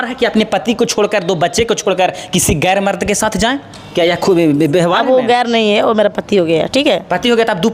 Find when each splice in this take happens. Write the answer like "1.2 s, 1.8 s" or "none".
none